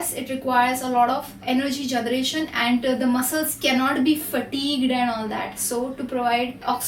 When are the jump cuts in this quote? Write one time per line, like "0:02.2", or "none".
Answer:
none